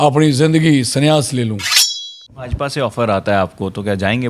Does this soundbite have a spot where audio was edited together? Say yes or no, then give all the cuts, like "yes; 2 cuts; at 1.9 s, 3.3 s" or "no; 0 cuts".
yes; 1 cut; at 1.8 s